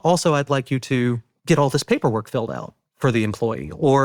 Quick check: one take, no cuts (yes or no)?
no